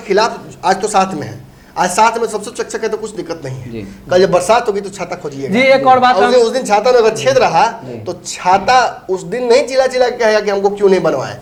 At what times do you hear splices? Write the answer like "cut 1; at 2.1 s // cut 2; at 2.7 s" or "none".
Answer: none